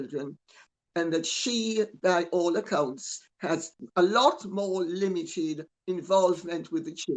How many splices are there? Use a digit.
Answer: 1